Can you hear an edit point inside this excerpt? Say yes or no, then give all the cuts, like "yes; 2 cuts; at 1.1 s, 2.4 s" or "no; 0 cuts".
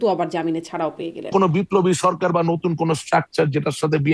yes; 1 cut; at 1.3 s